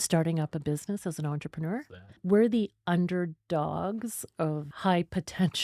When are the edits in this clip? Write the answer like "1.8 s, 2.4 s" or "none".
2.2 s, 4.7 s